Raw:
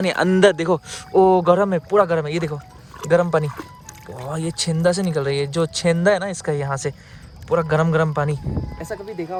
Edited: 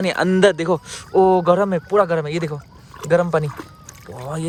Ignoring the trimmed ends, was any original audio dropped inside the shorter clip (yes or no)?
no